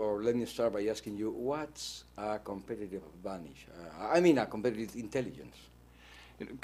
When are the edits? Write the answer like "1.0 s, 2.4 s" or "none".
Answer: 3.4 s